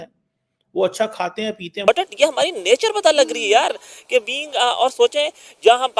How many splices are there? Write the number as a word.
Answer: one